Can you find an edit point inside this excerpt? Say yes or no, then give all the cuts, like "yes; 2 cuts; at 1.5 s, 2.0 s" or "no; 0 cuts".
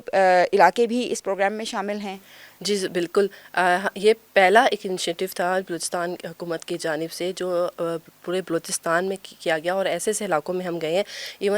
no; 0 cuts